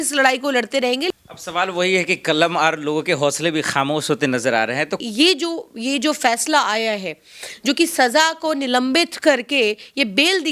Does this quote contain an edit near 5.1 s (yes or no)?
yes